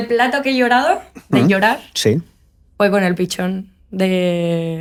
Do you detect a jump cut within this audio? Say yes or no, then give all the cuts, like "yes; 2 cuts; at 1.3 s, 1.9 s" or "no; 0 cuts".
no; 0 cuts